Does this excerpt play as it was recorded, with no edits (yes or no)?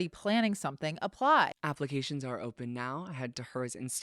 no